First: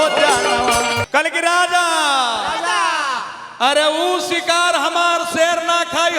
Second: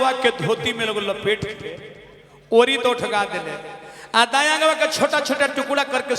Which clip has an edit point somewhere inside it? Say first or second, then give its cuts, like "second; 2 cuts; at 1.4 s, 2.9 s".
first; 1 cut; at 1.0 s